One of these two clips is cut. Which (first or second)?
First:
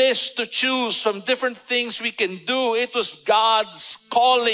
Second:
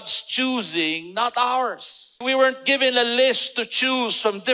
second